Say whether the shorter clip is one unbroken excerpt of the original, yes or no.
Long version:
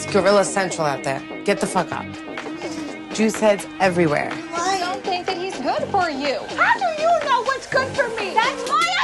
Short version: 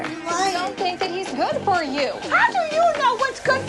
yes